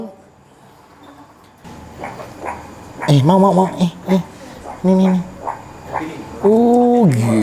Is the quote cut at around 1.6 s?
yes; 1 cut; at 1.6 s

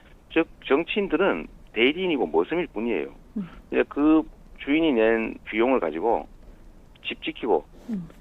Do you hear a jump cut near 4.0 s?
no; 1 cut; at 0.9 s

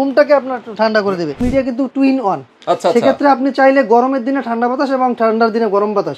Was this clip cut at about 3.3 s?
no; 1 cut; at 1.4 s

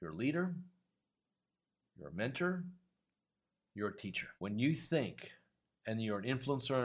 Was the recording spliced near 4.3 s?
yes; 1 cut; at 4.3 s

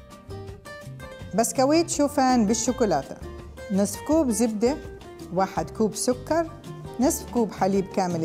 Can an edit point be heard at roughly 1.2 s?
yes; 1 cut; at 1.2 s

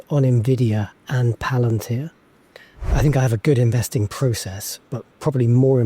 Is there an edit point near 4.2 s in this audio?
no; 1 cut; at 2.9 s

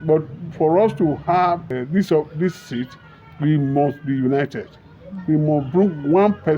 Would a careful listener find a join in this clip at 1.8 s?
yes; 1 cut; at 1.8 s

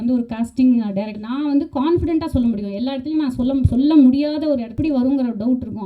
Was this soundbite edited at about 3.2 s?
no; 2 cuts; at 1.2 s, 4.7 s

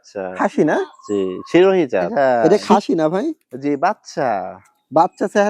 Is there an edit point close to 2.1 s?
yes; 1 cut; at 2.1 s

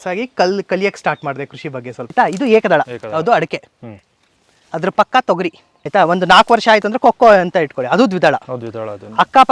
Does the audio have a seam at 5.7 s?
yes; 3 cuts; at 2.0 s, 3.0 s, 5.7 s

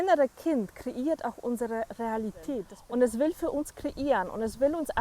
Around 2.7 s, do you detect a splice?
yes; 1 cut; at 2.7 s

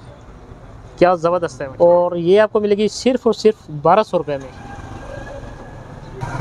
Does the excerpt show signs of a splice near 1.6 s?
yes; 2 cuts; at 1.6 s, 4.5 s

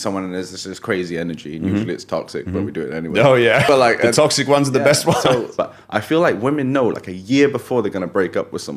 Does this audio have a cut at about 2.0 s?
no; 2 cuts; at 3.6 s, 5.5 s

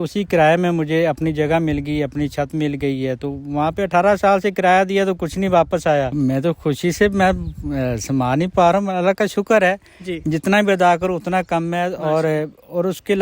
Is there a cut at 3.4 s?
no; 1 cut; at 6.1 s

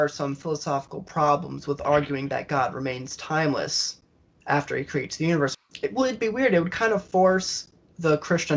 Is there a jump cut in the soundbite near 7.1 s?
no; 1 cut; at 5.5 s

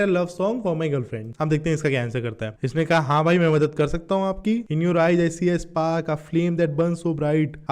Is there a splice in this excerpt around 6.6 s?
no; 3 cuts; at 1.2 s, 2.5 s, 4.7 s

